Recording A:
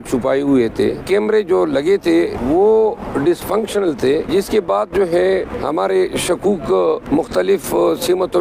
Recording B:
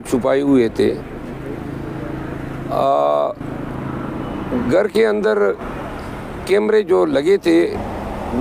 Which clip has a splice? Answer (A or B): A